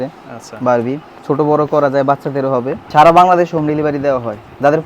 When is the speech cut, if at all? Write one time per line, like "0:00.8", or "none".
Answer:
0:01.1
0:02.8